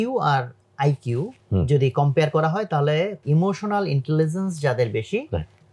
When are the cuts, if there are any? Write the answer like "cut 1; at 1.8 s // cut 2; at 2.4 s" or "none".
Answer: cut 1; at 1.4 s // cut 2; at 3.2 s